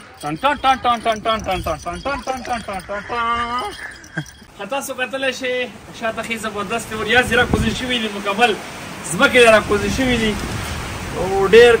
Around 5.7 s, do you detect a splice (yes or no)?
no